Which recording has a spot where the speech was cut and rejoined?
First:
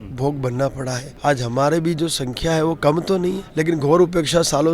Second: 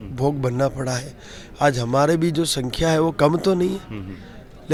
first; 2 cuts; at 1.1 s, 3.4 s

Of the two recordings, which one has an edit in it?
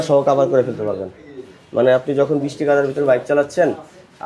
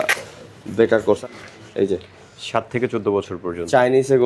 second; 1 cut; at 1.0 s

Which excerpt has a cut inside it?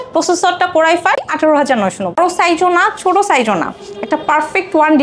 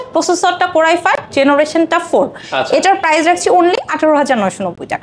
first; 2 cuts; at 1.2 s, 2.2 s

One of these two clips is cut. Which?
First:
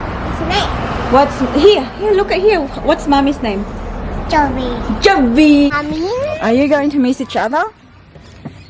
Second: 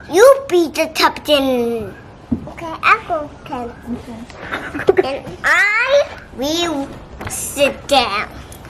first; 1 cut; at 5.8 s

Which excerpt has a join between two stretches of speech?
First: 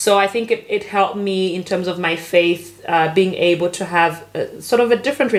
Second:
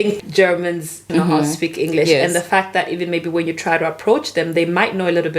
second; 1 cut; at 1.1 s

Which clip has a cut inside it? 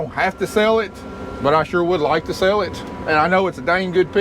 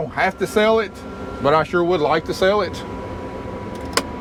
first; 1 cut; at 2.9 s

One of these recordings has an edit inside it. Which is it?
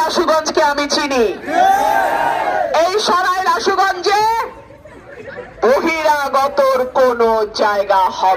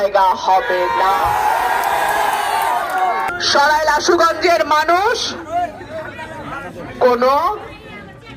second; 1 cut; at 3.3 s

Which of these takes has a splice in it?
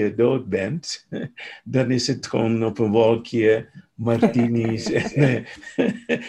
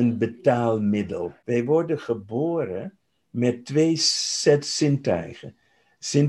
second; 1 cut; at 1.3 s

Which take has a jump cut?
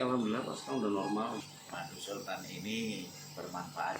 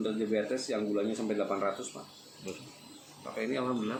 first; 1 cut; at 1.4 s

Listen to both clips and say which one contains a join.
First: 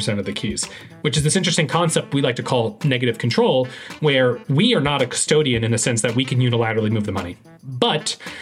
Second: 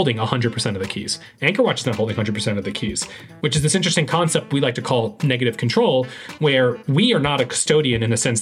first; 1 cut; at 7.3 s

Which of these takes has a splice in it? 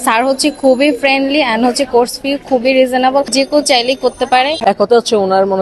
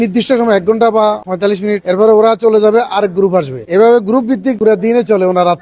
first; 1 cut; at 4.6 s

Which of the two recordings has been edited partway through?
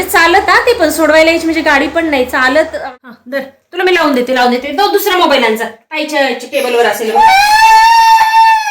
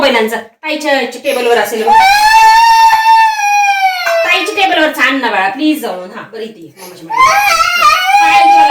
first; 1 cut; at 2.7 s

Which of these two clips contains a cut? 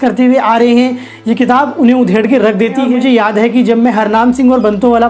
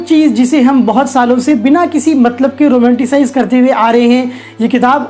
first; 1 cut; at 2.8 s

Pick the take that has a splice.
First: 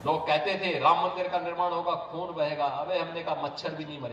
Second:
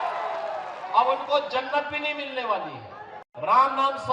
second; 1 cut; at 3.1 s

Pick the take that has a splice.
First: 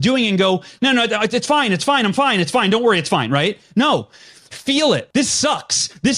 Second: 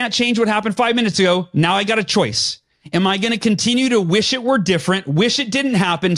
first; 1 cut; at 5.0 s

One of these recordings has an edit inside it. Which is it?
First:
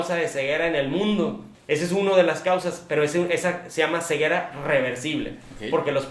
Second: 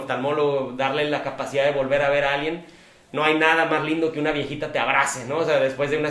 first; 1 cut; at 1.5 s

